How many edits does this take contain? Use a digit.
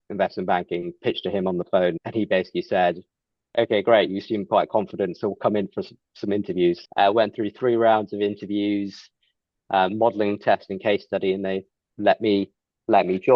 2